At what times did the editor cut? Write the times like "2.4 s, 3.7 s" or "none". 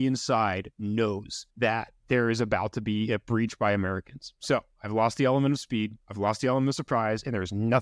1.7 s, 6.0 s

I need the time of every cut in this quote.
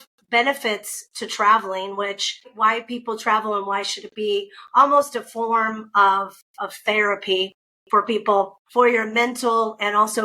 2.5 s, 8.6 s

